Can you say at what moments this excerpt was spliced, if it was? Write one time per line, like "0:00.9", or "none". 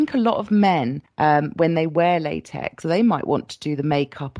0:01.0
0:02.8